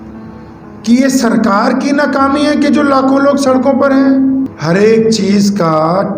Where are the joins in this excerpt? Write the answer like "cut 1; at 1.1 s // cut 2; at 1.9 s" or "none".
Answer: cut 1; at 4.5 s